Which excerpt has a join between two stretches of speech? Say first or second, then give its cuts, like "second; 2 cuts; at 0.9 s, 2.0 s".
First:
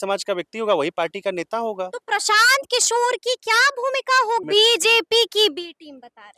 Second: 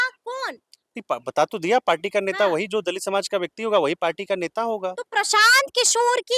first; 1 cut; at 4.4 s